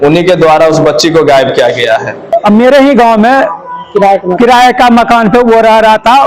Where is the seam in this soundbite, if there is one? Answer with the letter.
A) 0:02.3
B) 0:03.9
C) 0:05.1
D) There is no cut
A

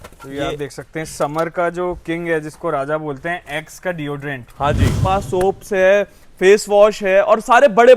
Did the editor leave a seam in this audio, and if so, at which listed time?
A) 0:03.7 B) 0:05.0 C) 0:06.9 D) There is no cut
B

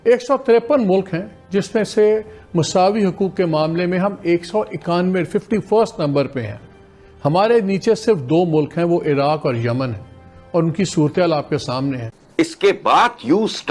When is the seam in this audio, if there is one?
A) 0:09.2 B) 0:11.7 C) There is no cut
B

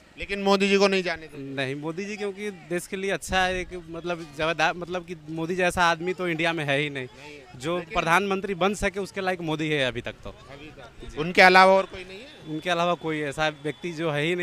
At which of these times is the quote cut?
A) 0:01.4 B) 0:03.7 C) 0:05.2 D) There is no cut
D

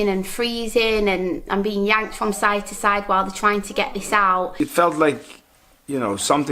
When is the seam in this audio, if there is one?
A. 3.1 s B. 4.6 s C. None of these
B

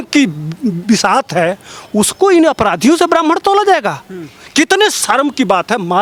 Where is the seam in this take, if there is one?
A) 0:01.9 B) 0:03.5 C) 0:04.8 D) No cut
D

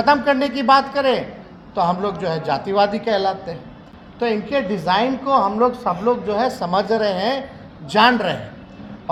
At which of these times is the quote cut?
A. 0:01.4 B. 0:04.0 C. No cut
C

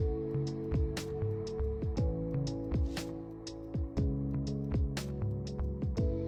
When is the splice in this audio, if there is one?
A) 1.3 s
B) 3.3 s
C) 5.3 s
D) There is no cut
D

